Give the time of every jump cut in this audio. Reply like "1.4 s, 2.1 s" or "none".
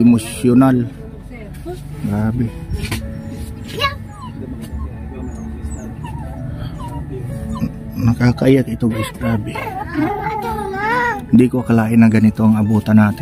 2.8 s